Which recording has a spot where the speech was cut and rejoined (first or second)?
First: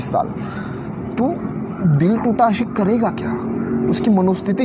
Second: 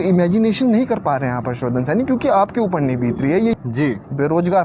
second